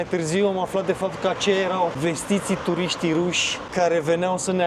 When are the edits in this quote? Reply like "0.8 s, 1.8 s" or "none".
2.0 s